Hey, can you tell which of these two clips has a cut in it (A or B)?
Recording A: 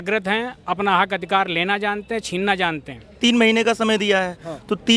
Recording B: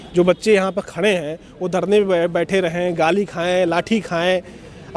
A